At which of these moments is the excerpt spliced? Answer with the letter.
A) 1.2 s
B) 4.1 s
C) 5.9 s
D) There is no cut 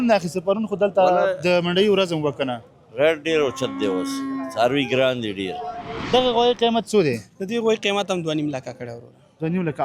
C